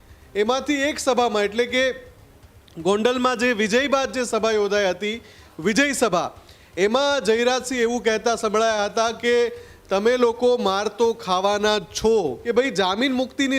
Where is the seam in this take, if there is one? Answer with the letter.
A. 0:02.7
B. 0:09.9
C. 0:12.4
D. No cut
C